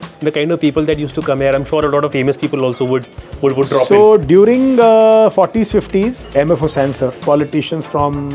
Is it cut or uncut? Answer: cut